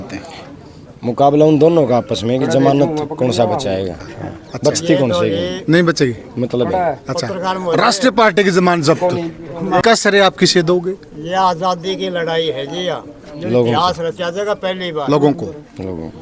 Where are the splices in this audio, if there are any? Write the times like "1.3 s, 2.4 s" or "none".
none